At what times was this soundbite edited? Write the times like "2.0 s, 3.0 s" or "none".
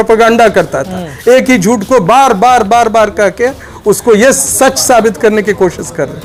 none

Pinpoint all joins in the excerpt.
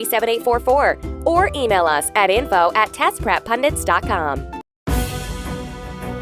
4.7 s

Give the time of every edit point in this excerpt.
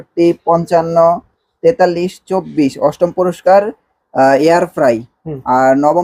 none

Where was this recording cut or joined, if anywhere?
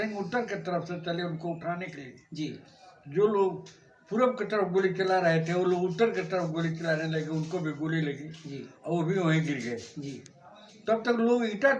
none

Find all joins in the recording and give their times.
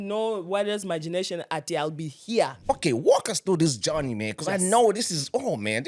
2.6 s

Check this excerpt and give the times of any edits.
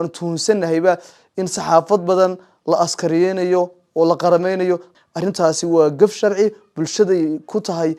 none

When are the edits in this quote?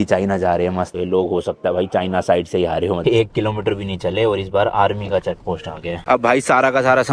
0.9 s, 3.0 s, 6.0 s

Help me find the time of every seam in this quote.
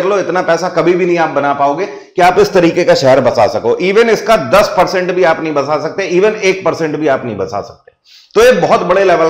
none

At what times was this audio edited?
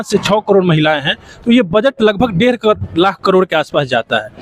none

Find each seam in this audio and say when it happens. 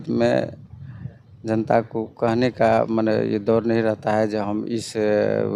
none

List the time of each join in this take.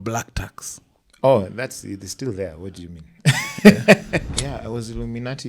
4.1 s

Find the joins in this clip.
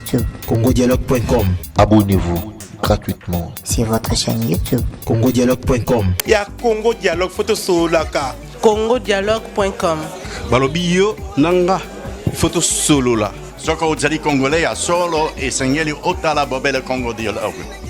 1.6 s, 6.1 s

